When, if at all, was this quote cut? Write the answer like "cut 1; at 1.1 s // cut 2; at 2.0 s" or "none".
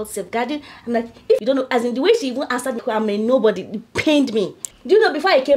cut 1; at 1.4 s // cut 2; at 2.8 s // cut 3; at 4.6 s